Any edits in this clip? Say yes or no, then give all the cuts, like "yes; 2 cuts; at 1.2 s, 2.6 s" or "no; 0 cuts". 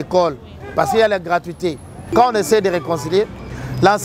yes; 1 cut; at 2.1 s